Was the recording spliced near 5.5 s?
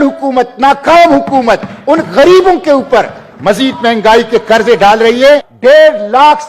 yes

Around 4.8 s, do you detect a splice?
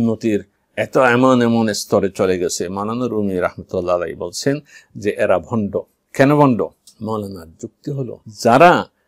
no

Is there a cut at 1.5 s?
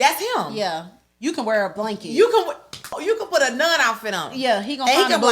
no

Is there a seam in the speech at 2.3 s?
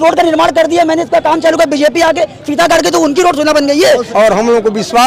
no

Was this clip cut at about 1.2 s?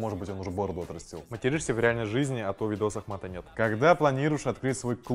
yes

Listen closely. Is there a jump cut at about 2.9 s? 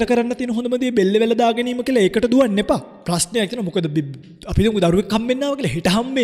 yes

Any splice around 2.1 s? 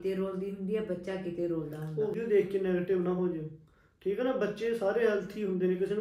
yes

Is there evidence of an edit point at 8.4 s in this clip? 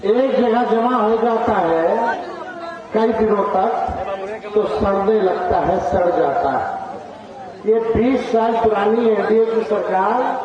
no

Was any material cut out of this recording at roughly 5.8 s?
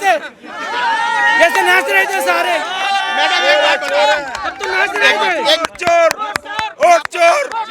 yes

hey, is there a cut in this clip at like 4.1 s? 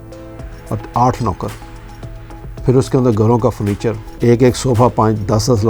yes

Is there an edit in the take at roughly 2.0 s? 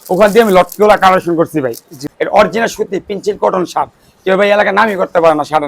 yes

